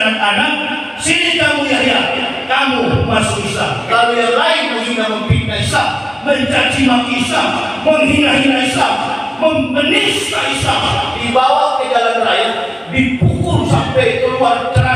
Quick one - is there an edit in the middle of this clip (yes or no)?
no